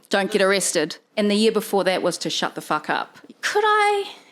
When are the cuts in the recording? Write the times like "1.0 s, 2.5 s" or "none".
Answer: 1.0 s, 3.2 s